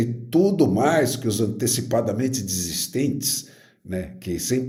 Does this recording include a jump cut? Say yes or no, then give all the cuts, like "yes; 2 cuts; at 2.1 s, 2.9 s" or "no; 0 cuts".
no; 0 cuts